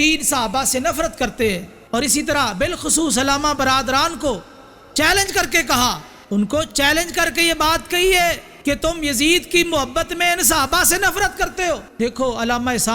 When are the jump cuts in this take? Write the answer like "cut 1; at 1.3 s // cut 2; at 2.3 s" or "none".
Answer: cut 1; at 1.7 s // cut 2; at 6.1 s // cut 3; at 8.5 s // cut 4; at 11.9 s